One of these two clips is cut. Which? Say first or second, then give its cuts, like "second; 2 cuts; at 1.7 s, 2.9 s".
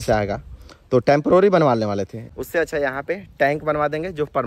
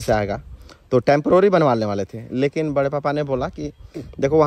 first; 1 cut; at 2.2 s